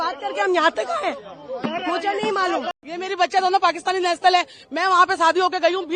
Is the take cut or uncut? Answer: uncut